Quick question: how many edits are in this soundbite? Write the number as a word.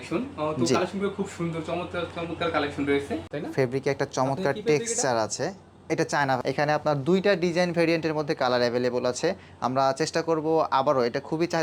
two